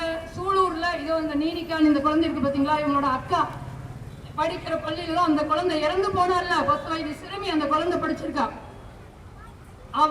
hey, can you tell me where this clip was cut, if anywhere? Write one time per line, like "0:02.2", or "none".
none